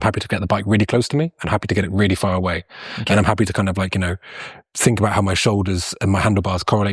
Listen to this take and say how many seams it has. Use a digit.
0